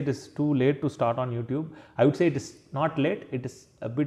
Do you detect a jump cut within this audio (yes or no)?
no